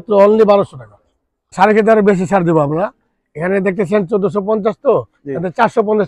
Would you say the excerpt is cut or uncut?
cut